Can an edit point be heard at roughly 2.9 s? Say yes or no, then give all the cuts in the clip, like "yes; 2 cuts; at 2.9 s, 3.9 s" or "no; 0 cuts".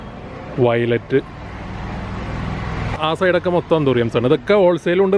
yes; 1 cut; at 2.9 s